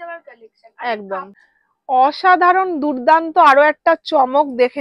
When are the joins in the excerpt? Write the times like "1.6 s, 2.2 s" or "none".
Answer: 1.4 s